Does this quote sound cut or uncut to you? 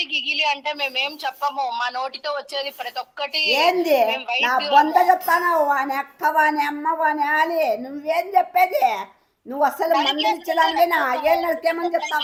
uncut